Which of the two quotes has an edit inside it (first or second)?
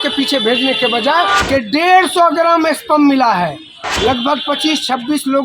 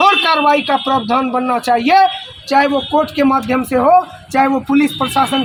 first